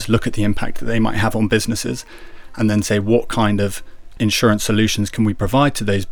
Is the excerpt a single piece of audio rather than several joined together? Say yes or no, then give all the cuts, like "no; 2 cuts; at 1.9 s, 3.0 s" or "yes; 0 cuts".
no; 1 cut; at 4.0 s